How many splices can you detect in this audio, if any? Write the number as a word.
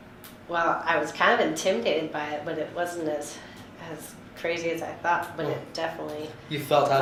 zero